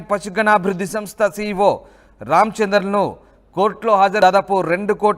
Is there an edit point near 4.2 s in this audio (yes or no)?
yes